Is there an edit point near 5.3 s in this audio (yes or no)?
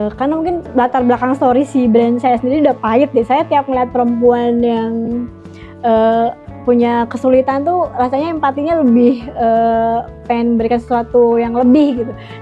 no